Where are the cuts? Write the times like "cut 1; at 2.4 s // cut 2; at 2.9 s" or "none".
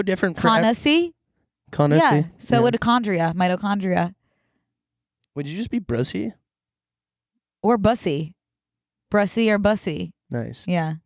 cut 1; at 10.2 s